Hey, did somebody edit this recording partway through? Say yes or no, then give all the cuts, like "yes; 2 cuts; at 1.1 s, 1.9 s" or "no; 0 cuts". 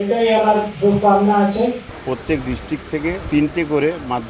yes; 2 cuts; at 1.9 s, 3.2 s